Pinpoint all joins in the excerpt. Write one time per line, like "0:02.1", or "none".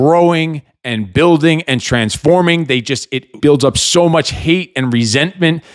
0:03.3